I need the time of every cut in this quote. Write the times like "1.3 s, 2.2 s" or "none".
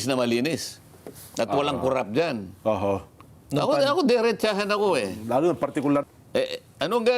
6.0 s